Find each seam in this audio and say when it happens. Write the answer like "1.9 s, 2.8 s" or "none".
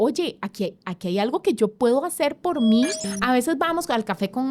3.1 s